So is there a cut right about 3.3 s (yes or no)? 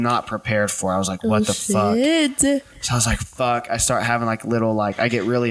no